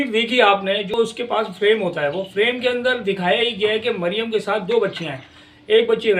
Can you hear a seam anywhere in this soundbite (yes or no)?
yes